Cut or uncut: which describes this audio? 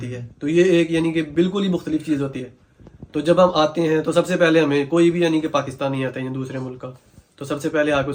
uncut